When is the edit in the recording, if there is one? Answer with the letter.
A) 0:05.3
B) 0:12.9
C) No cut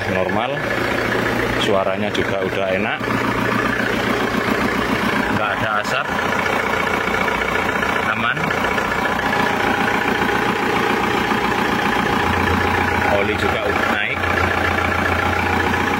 C